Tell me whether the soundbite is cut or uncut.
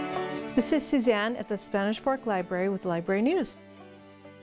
cut